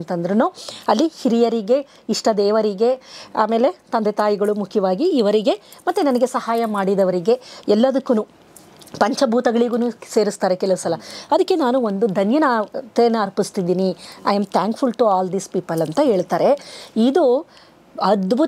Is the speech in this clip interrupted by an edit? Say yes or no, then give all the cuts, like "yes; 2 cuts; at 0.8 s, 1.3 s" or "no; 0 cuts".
no; 0 cuts